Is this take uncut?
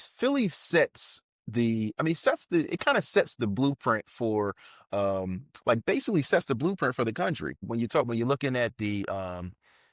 no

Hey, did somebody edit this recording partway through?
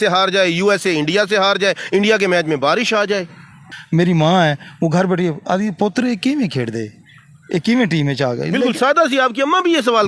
yes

